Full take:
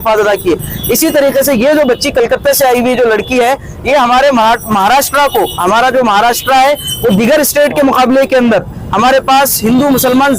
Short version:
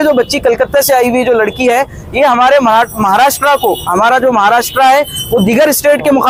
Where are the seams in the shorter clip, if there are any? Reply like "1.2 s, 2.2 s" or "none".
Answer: none